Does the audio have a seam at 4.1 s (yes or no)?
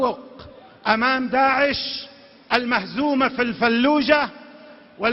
yes